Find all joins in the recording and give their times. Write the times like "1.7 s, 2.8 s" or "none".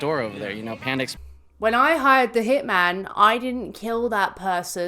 1.1 s